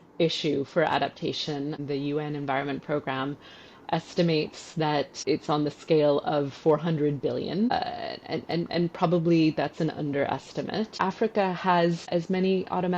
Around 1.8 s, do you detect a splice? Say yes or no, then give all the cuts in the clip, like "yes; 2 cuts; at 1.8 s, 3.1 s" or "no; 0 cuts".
yes; 5 cuts; at 1.8 s, 5.2 s, 7.7 s, 10.9 s, 12.1 s